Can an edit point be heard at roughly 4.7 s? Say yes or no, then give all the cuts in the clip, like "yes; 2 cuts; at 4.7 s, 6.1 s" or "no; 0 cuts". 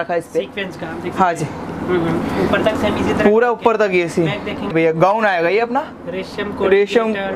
yes; 1 cut; at 4.7 s